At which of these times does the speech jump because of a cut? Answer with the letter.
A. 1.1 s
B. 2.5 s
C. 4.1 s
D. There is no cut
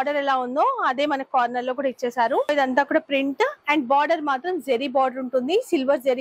B